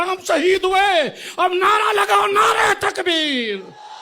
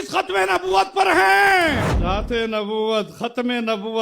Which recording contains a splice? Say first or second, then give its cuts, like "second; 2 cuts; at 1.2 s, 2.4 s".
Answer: second; 1 cut; at 1.9 s